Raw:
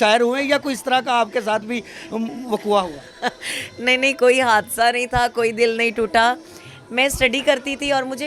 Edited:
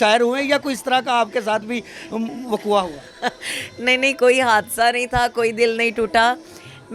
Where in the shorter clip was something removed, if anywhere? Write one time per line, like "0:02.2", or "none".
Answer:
none

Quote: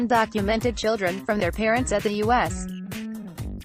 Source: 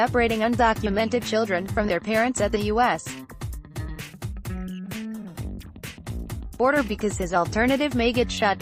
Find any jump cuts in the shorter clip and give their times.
0:02.5

